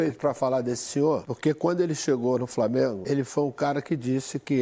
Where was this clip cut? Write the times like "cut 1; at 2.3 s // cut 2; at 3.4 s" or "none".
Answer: cut 1; at 1.3 s // cut 2; at 3.0 s